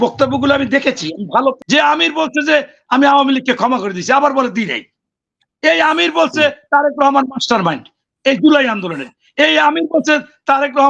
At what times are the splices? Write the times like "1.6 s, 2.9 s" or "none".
1.6 s